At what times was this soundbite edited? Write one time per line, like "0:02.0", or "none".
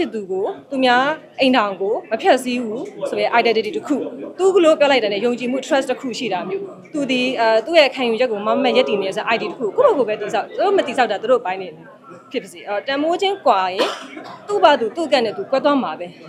none